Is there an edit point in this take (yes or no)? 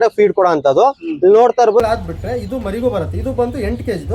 yes